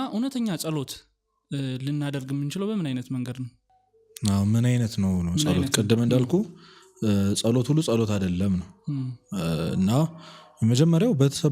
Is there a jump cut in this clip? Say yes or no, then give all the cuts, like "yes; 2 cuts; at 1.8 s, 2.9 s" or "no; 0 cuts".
no; 0 cuts